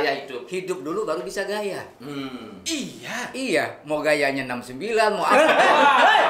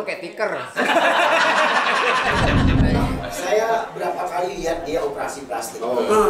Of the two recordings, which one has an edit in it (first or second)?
second